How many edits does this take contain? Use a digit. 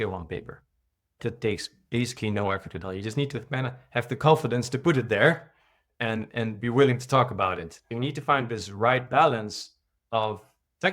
2